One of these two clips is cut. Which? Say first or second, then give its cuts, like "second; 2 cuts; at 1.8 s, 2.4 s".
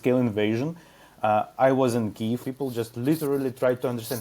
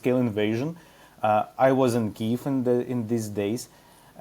first; 1 cut; at 2.4 s